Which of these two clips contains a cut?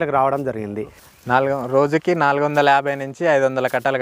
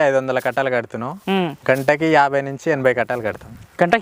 first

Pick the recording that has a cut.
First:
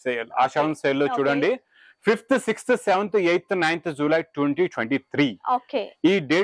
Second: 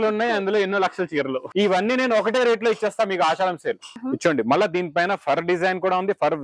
second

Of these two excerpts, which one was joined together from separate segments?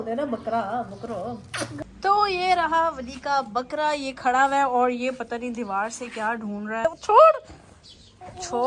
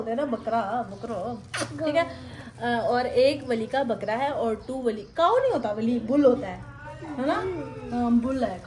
first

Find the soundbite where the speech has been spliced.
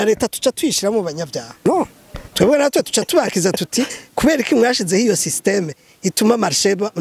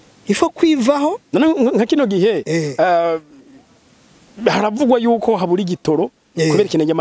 first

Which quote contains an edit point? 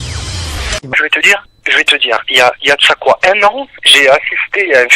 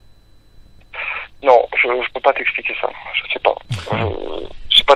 first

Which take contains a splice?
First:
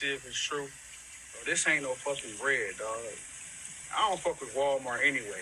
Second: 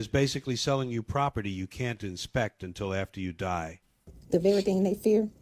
second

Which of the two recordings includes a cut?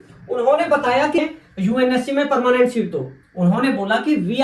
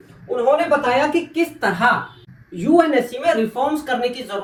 first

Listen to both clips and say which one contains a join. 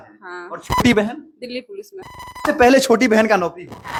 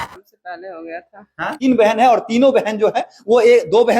second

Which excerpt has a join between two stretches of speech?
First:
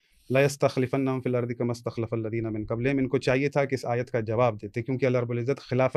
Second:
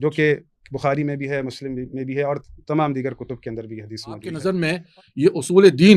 second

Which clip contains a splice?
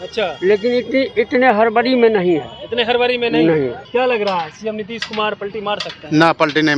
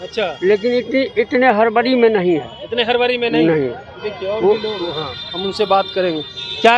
first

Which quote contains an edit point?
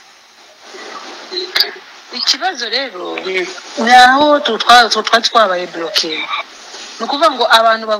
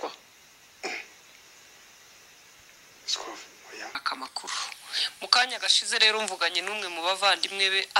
second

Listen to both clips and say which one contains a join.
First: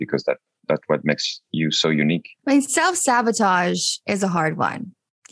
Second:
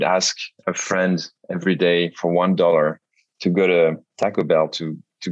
first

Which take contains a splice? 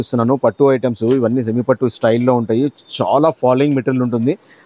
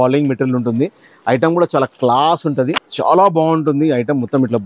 second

